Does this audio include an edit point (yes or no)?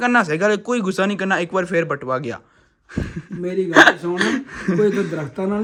no